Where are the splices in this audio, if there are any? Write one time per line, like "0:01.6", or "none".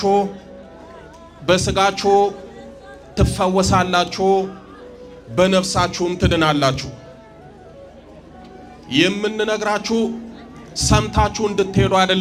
none